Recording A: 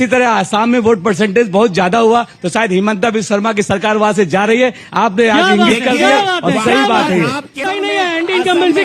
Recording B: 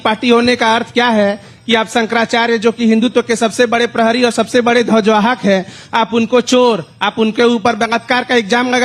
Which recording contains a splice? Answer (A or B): A